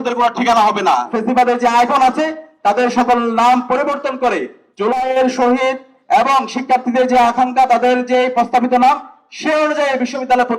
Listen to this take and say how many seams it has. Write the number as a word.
one